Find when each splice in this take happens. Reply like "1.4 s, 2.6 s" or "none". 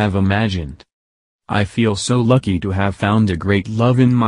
1.0 s